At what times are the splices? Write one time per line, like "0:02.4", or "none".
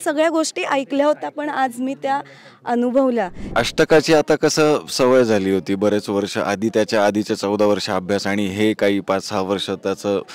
0:03.5

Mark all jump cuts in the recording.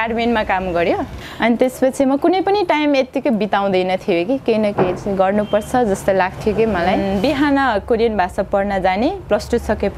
0:01.1
0:07.0

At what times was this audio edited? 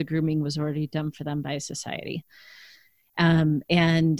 none

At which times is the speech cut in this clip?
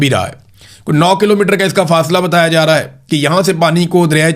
none

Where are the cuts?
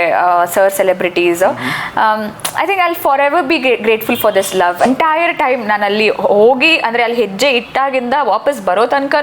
0:04.9

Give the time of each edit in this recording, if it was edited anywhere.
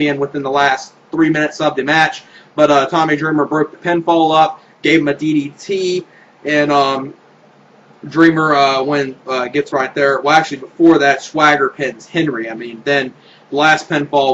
none

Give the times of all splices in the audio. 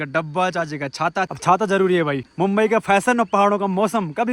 0:01.3
0:02.2

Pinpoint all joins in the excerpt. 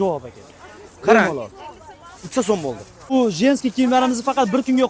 0:03.1

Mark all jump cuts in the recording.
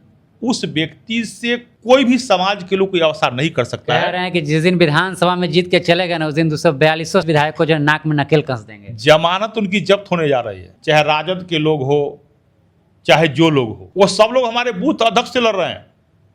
0:01.7
0:07.2
0:10.6
0:13.8

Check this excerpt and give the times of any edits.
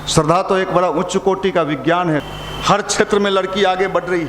0:02.3

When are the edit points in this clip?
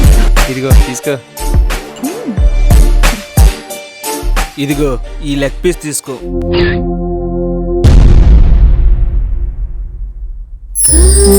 0:01.5

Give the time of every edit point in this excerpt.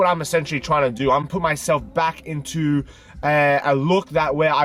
0:01.3

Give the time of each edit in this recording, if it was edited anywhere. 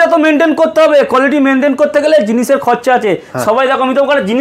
none

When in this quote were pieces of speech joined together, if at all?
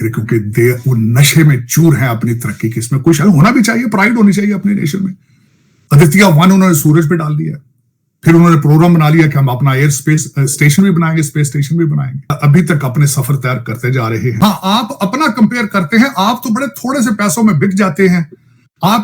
0:12.2
0:14.3

